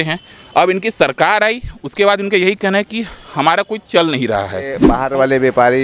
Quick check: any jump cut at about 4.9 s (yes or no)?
yes